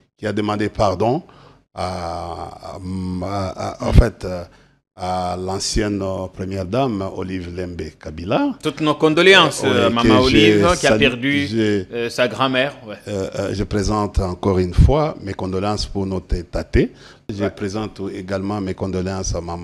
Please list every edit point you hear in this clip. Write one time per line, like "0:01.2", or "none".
0:17.3